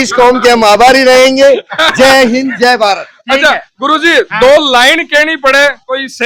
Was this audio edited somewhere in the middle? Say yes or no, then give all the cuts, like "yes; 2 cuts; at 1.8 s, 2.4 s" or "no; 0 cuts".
no; 0 cuts